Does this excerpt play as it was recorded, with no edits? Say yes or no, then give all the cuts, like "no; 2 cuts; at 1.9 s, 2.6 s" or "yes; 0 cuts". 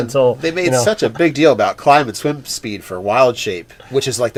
yes; 0 cuts